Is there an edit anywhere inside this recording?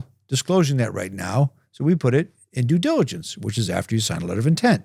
no; 0 cuts

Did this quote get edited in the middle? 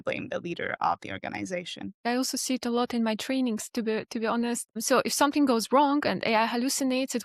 no; 0 cuts

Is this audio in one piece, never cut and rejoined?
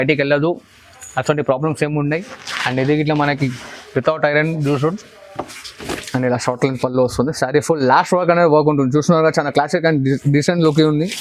no; 1 cut; at 5.7 s

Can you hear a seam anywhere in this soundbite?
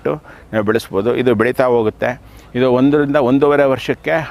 no; 0 cuts

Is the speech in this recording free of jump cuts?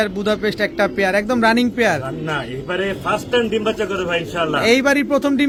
yes; 0 cuts

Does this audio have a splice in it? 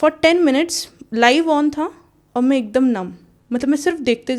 no; 0 cuts

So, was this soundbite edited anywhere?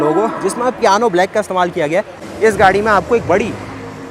yes; 1 cut; at 2.2 s

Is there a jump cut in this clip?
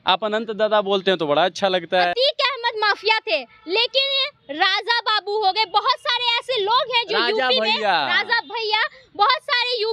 yes; 1 cut; at 2.1 s

